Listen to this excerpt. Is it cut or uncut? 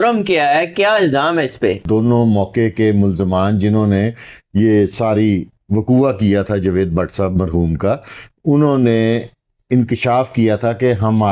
cut